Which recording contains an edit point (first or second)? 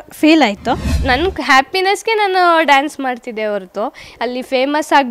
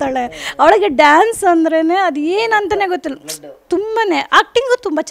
first